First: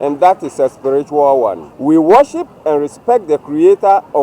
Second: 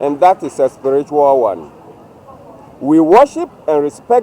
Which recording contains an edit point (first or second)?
first